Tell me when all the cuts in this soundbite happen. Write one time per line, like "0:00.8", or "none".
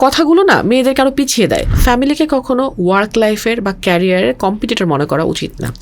0:01.7